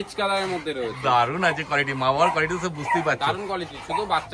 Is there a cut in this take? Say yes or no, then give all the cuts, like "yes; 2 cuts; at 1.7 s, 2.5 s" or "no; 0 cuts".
no; 0 cuts